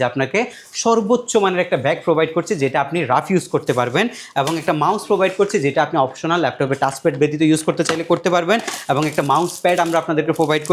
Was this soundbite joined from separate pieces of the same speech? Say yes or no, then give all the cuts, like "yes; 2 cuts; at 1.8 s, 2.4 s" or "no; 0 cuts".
no; 0 cuts